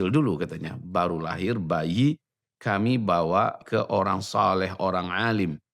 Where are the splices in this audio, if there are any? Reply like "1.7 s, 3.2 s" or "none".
3.6 s